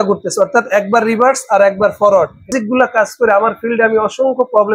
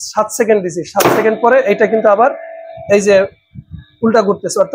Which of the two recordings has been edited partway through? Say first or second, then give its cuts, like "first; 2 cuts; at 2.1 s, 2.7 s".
first; 1 cut; at 2.5 s